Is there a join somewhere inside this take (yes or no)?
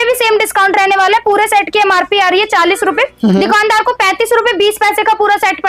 no